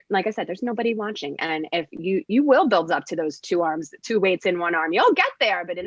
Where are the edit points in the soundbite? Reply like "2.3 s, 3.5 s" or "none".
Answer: none